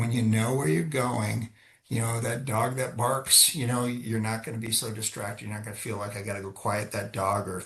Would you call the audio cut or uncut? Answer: uncut